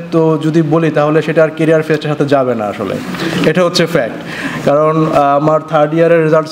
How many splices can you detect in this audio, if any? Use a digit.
0